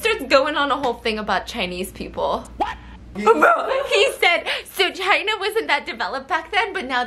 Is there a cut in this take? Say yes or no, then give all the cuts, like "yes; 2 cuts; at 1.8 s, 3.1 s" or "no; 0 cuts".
no; 0 cuts